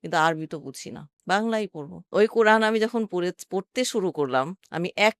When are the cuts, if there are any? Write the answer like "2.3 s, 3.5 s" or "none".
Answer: 2.0 s